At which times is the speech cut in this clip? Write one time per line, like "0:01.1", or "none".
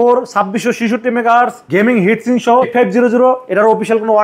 0:01.6
0:02.7